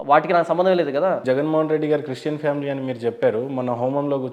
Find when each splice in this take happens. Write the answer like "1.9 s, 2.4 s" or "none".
1.2 s